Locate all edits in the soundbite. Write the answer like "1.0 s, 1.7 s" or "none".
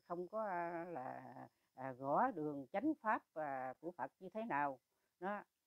none